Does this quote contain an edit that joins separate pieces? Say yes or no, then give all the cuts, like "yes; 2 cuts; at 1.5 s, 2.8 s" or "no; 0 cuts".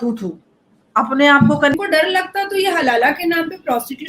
yes; 1 cut; at 1.8 s